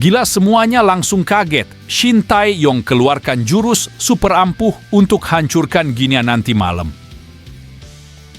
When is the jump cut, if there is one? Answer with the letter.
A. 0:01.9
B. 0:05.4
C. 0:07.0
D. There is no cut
C